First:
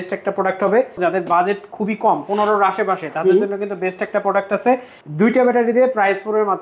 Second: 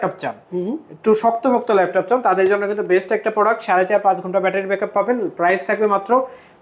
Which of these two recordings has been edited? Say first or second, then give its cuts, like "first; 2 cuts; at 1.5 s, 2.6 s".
first; 2 cuts; at 1.0 s, 5.0 s